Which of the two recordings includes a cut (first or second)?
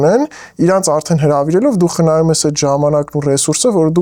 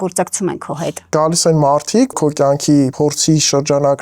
second